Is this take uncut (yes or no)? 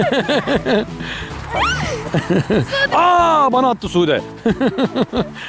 yes